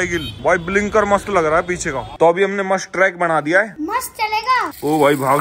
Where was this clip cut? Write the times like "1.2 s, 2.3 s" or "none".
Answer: 2.1 s, 3.7 s